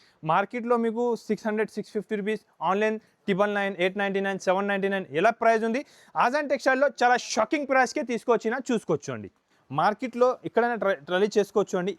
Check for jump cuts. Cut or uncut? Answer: cut